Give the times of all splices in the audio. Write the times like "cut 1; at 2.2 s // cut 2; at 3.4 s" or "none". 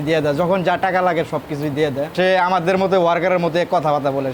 cut 1; at 2.1 s